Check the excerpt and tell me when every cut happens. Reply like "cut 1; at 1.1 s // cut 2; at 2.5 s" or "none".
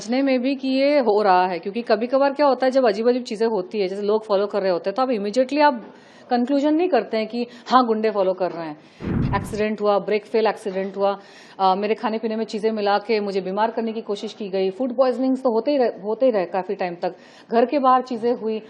cut 1; at 9.0 s